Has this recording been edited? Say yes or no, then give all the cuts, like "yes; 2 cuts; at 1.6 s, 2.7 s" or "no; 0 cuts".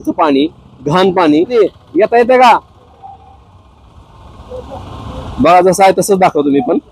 yes; 1 cut; at 1.5 s